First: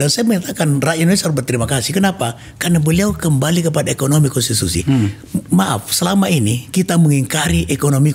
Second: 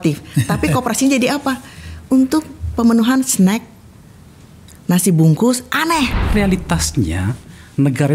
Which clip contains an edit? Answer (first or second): second